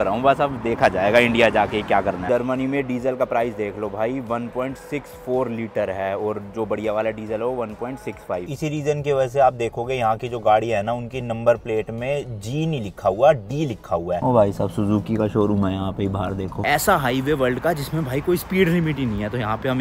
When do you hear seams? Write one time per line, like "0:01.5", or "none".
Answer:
0:02.3
0:08.5
0:14.2
0:16.6